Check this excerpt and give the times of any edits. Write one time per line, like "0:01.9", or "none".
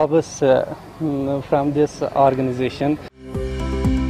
0:03.2